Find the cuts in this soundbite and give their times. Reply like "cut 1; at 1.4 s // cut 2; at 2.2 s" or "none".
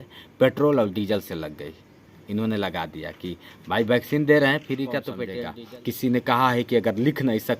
cut 1; at 5.2 s